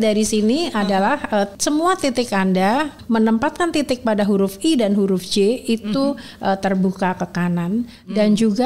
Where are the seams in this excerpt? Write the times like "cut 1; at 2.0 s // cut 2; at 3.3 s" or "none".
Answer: cut 1; at 1.6 s // cut 2; at 2.9 s